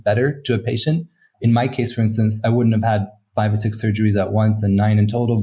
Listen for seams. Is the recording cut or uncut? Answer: cut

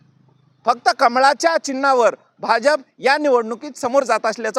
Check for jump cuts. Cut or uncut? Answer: uncut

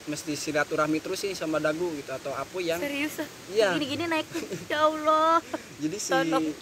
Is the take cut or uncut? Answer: uncut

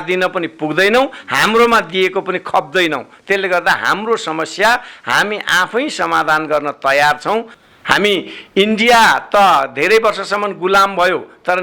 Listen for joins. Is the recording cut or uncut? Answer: cut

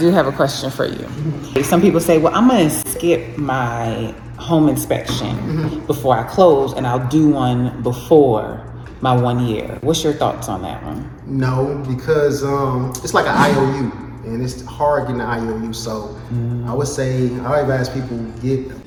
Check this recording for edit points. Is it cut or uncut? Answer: uncut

